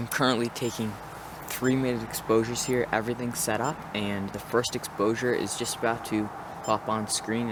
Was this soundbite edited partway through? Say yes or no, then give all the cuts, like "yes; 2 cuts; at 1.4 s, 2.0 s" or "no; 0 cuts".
no; 0 cuts